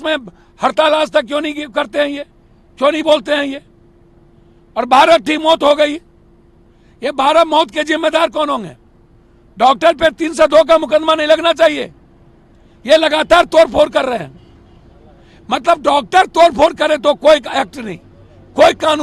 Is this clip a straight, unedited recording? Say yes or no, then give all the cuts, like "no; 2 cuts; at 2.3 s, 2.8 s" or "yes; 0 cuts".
yes; 0 cuts